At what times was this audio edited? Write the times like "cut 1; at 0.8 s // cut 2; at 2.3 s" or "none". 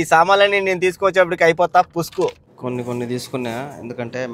cut 1; at 2.5 s